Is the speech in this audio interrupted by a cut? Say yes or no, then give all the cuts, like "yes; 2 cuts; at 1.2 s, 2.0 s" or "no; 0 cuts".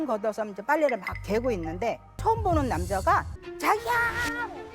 yes; 2 cuts; at 2.1 s, 3.4 s